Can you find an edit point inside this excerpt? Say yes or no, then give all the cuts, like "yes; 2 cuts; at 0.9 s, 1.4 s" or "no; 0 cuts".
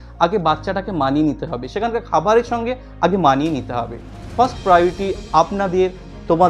no; 0 cuts